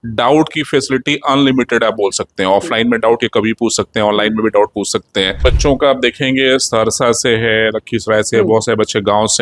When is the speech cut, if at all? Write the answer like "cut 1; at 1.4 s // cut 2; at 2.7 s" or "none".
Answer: cut 1; at 5.3 s